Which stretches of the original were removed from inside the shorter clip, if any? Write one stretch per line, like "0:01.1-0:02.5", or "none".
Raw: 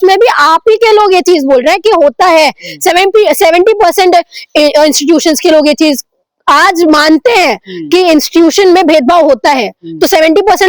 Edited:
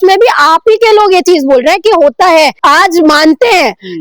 0:02.6-0:06.4

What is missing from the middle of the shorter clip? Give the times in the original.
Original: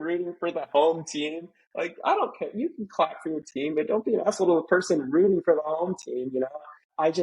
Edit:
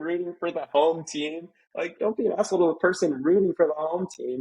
0:02.0-0:03.9

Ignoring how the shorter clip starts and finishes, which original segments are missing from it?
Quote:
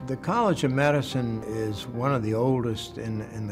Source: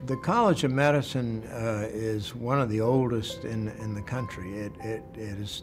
0:01.5-0:01.9

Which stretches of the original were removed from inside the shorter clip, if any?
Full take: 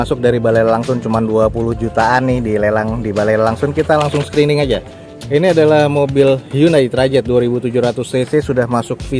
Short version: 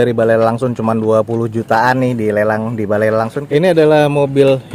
0:03.6-0:05.2

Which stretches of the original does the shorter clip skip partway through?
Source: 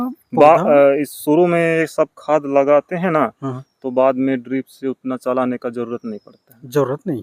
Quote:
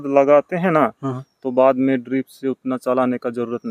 none

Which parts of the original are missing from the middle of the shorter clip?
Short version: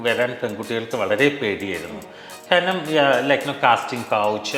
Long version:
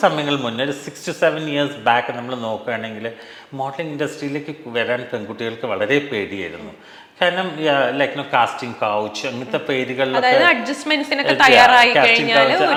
none

